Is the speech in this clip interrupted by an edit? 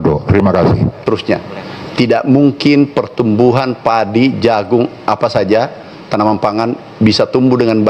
yes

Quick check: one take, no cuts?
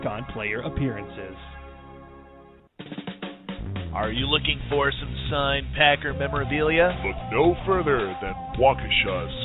no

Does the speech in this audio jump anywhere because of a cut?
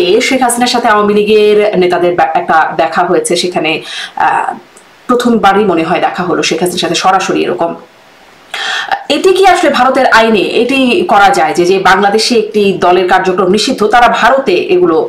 no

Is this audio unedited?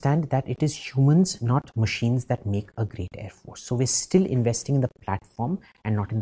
yes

